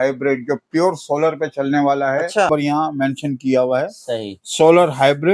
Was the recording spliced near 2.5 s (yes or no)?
yes